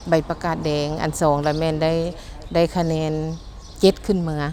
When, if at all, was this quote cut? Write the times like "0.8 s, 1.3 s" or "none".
none